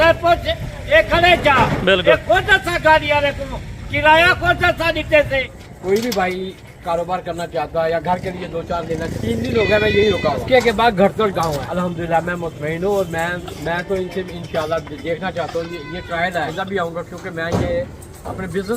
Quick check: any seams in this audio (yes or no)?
yes